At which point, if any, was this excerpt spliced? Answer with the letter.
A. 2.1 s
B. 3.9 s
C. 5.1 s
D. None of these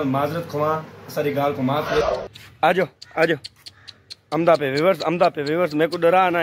A